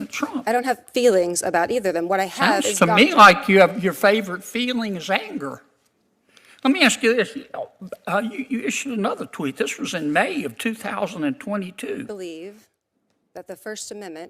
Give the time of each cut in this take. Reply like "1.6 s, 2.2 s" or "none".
12.1 s